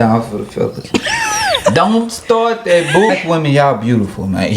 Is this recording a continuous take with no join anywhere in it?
no; 1 cut; at 3.1 s

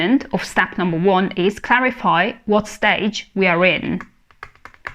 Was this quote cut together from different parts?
no; 0 cuts

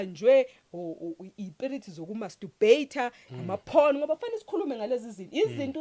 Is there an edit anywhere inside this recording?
no; 0 cuts

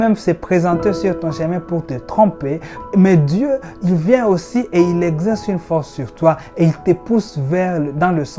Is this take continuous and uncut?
no; 1 cut; at 2.7 s

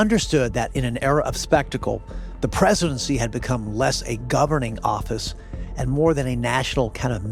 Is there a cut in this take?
no; 0 cuts

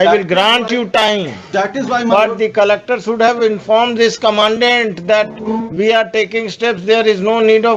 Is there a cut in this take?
no; 0 cuts

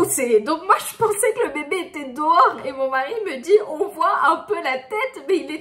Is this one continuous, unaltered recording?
yes; 0 cuts

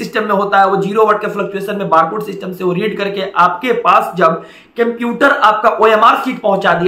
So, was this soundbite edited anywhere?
no; 0 cuts

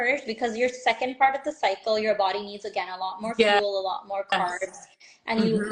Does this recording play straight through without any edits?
yes; 0 cuts

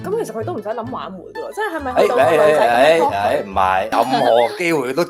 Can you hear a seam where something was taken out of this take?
yes; 1 cut; at 3.9 s

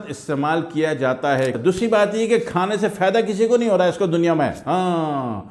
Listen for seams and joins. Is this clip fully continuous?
no; 1 cut; at 1.6 s

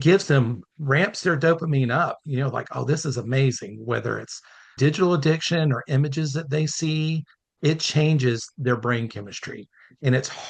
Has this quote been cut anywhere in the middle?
yes; 2 cuts; at 4.6 s, 7.5 s

